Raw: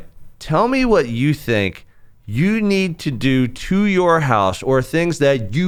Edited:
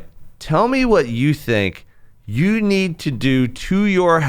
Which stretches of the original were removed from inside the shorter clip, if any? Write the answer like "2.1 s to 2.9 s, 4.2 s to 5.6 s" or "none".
none